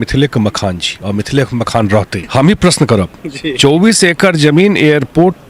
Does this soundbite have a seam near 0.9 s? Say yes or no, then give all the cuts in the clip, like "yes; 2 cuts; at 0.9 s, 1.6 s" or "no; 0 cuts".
no; 1 cut; at 2.2 s